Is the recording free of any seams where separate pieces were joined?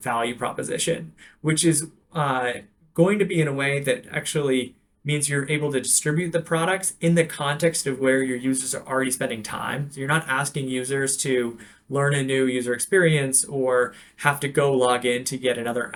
yes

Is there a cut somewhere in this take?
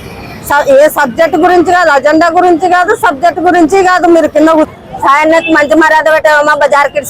yes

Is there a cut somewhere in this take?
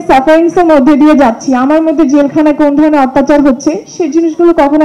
no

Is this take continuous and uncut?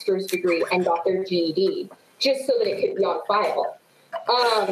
yes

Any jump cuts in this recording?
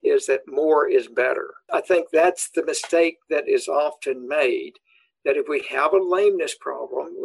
yes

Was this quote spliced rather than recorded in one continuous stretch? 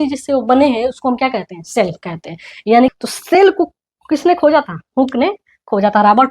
yes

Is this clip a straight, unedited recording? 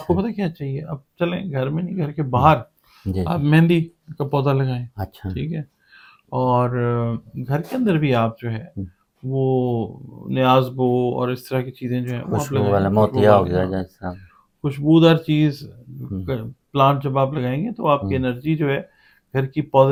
yes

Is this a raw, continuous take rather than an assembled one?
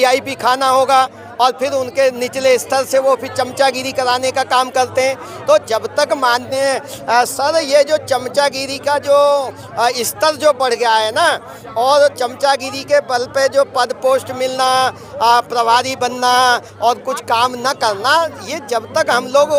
yes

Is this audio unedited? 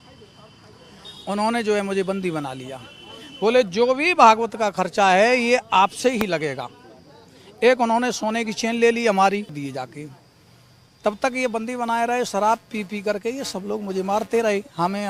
no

